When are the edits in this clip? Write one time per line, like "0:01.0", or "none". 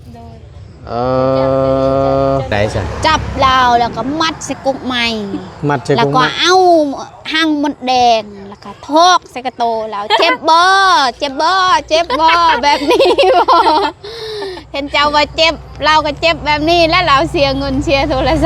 0:02.5